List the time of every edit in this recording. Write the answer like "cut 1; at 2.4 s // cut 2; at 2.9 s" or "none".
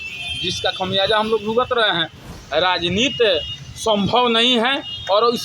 cut 1; at 2.3 s